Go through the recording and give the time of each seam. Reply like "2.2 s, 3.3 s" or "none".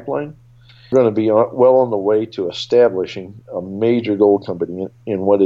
0.9 s